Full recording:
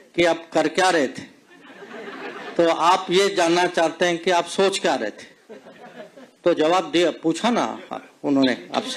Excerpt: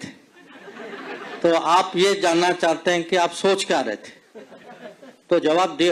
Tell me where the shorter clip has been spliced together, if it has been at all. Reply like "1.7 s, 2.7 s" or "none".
none